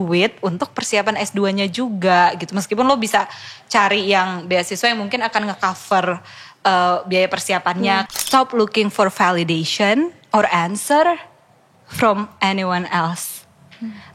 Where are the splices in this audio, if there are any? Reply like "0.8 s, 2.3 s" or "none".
8.1 s